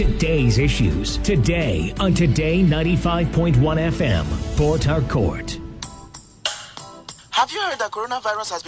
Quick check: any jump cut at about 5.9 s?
yes; 1 cut; at 5.9 s

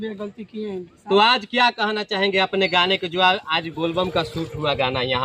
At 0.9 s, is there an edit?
yes; 1 cut; at 0.9 s

